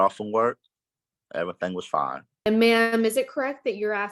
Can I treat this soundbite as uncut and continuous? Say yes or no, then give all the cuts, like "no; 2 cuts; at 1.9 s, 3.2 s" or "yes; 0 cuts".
no; 1 cut; at 2.3 s